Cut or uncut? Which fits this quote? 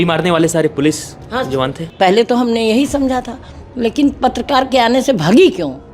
cut